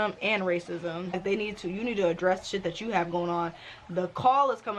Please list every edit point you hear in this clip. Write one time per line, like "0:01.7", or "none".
0:01.1